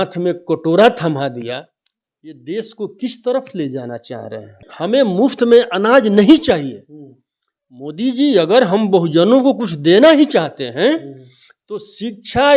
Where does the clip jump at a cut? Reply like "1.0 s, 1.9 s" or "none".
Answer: 4.7 s